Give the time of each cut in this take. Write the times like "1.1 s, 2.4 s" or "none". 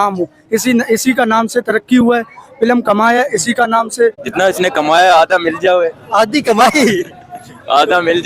4.2 s